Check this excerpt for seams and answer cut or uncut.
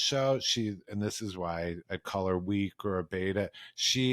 cut